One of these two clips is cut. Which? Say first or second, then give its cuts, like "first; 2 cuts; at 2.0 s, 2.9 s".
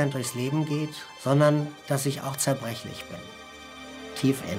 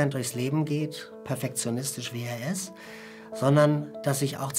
first; 1 cut; at 1.1 s